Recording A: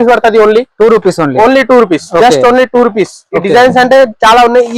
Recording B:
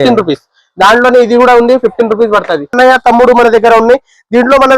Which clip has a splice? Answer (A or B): B